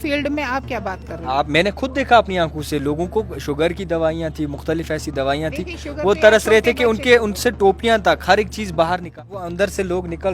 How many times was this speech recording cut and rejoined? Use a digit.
1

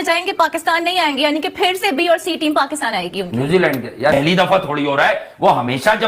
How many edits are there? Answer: 1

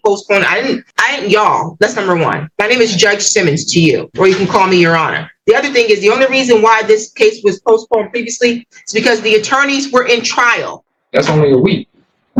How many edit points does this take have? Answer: 0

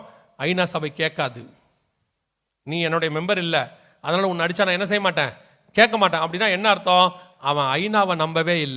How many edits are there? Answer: 1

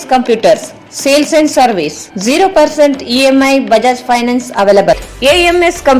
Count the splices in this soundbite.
1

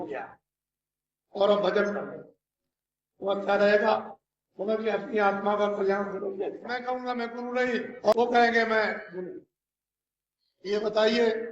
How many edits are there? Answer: 1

